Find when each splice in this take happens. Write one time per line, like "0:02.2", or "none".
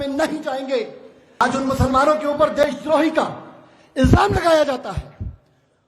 0:01.4